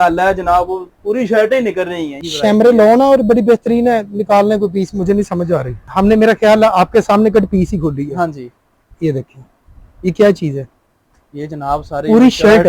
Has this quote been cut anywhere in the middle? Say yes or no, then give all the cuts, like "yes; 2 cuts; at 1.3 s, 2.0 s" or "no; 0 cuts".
yes; 2 cuts; at 2.1 s, 5.8 s